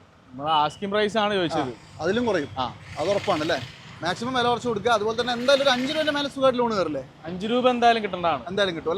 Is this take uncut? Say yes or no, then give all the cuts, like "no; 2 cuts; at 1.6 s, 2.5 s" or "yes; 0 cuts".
yes; 0 cuts